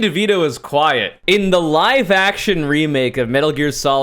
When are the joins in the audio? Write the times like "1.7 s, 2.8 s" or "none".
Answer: 1.1 s